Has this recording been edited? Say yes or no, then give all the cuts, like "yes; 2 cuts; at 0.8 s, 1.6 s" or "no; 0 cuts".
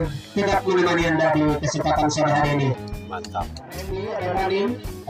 yes; 1 cut; at 3.9 s